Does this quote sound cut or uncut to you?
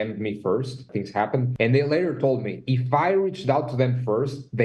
cut